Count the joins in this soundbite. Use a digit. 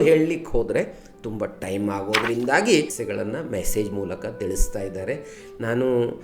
1